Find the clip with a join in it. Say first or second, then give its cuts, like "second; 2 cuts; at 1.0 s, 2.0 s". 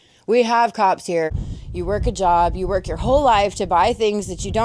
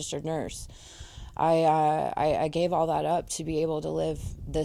first; 1 cut; at 1.3 s